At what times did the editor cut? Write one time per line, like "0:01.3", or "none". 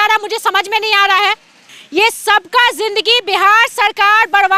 0:01.7